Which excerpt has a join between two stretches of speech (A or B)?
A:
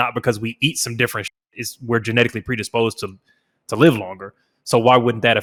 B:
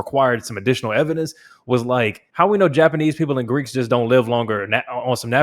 B